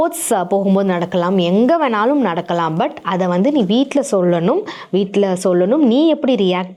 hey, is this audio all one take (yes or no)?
yes